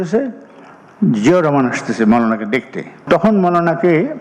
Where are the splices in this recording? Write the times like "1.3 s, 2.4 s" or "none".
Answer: 3.0 s